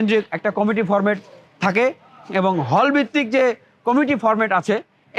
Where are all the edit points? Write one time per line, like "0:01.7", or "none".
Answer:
none